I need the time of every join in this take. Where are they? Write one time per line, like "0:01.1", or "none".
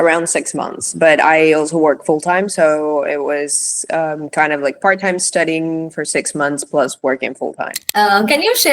0:07.8